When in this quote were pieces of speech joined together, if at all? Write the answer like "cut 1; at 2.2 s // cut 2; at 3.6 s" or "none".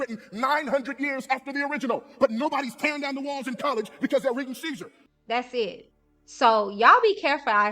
cut 1; at 5.0 s